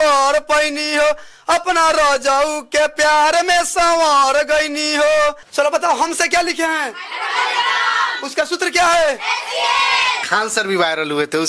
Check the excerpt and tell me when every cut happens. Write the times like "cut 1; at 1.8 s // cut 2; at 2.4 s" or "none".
cut 1; at 5.4 s // cut 2; at 10.2 s